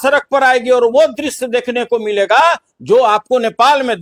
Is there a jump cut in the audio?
no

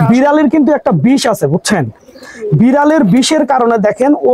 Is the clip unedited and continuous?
yes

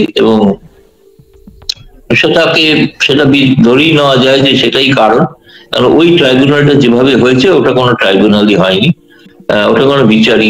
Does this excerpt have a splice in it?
no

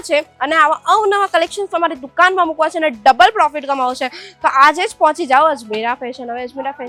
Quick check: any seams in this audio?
no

